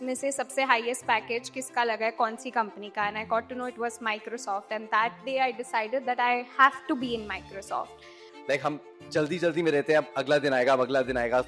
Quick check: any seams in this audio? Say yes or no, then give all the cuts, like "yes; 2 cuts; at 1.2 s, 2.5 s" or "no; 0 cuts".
yes; 1 cut; at 8.3 s